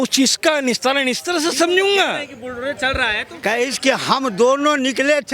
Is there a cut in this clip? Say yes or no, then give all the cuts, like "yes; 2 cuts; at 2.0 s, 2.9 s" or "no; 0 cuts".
yes; 1 cut; at 3.3 s